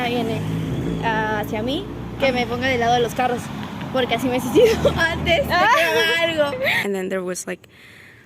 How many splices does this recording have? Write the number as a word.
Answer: one